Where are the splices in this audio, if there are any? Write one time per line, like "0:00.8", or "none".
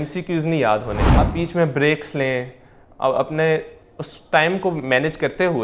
0:01.3